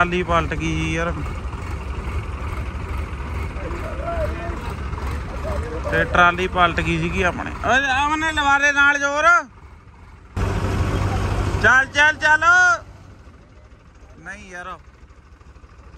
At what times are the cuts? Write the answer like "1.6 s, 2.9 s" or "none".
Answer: 10.4 s